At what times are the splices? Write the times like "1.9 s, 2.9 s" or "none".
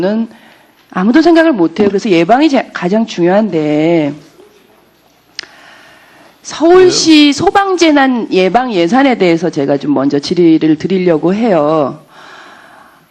6.6 s